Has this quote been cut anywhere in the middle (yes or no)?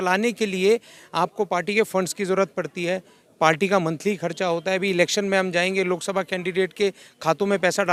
no